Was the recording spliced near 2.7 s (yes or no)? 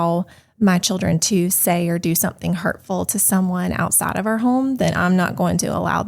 no